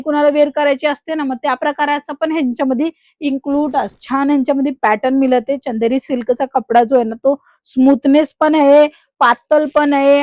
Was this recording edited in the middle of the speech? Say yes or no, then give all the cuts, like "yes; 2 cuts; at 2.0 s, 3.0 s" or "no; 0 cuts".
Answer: yes; 1 cut; at 4.0 s